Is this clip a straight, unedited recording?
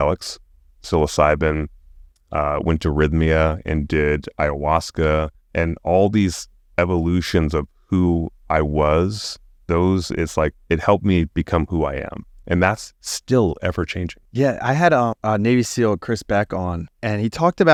yes; 0 cuts

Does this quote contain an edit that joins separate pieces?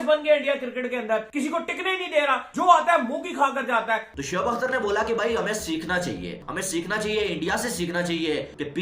yes; 1 cut; at 4.1 s

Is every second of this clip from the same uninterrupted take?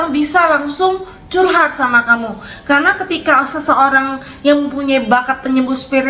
yes; 0 cuts

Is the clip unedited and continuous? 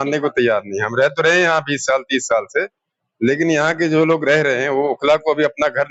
yes; 0 cuts

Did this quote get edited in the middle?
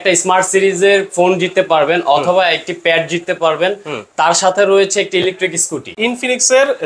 yes; 1 cut; at 5.9 s

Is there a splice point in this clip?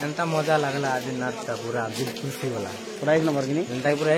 no; 0 cuts

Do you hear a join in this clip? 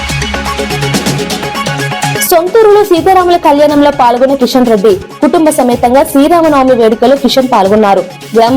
yes; 1 cut; at 2.2 s

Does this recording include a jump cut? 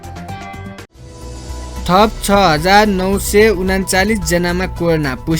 yes; 1 cut; at 1.3 s

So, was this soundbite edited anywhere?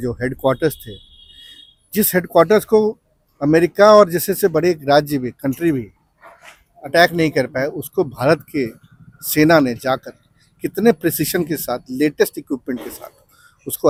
no; 0 cuts

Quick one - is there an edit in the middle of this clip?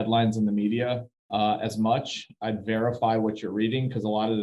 yes; 1 cut; at 1.1 s

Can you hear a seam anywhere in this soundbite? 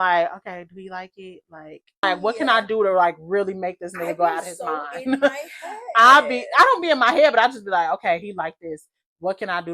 yes; 1 cut; at 2.0 s

